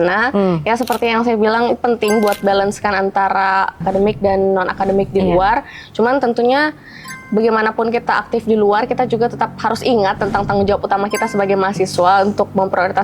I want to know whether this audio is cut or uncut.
cut